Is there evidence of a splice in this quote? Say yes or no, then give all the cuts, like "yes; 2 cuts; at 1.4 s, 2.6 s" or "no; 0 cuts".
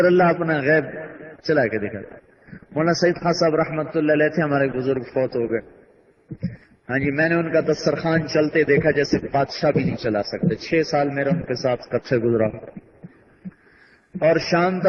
no; 0 cuts